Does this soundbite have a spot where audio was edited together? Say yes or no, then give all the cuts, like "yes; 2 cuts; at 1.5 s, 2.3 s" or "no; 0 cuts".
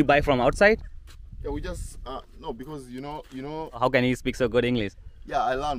yes; 1 cut; at 3.8 s